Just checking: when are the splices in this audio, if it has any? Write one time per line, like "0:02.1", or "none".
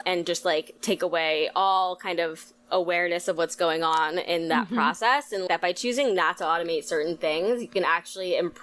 0:05.4